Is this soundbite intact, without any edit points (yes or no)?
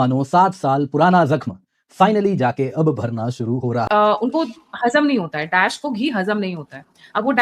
no